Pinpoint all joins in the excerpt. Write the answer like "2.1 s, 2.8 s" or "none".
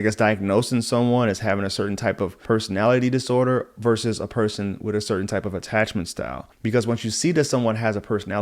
2.4 s, 6.4 s